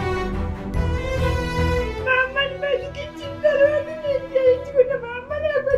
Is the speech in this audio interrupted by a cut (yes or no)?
yes